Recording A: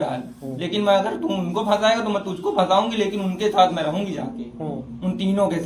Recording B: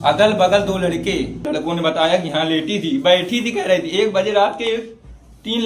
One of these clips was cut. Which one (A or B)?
B